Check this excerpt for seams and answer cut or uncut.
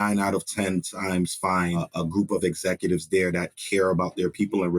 cut